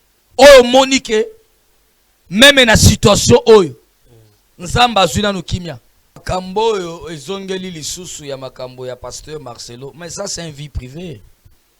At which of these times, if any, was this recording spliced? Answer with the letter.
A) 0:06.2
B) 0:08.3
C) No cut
A